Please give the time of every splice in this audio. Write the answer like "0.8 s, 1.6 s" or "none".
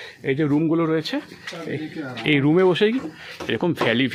none